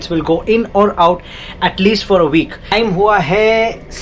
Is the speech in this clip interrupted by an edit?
yes; 1 cut; at 2.7 s

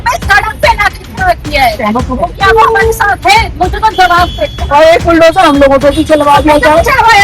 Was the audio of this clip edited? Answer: yes; 1 cut; at 4.6 s

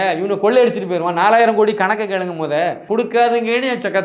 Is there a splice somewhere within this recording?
yes; 1 cut; at 2.8 s

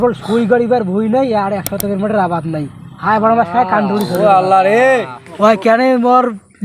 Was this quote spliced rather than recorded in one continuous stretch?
yes; 1 cut; at 5.2 s

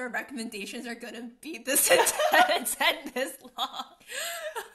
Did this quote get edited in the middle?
no; 0 cuts

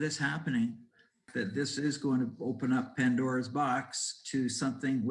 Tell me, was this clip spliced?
yes; 1 cut; at 1.2 s

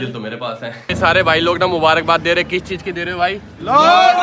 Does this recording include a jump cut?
yes; 1 cut; at 0.9 s

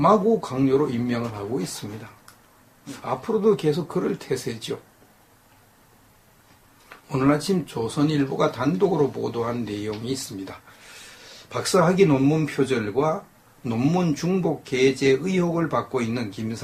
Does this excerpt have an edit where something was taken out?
no; 0 cuts

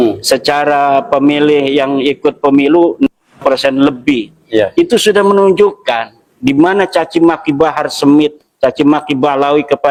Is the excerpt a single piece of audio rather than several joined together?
yes; 0 cuts

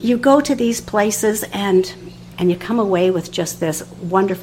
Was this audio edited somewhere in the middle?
yes; 1 cut; at 2.3 s

